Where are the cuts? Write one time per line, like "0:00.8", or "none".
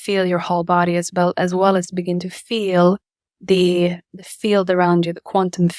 none